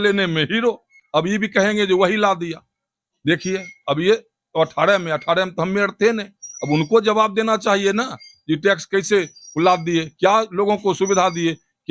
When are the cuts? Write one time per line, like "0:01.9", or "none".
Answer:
none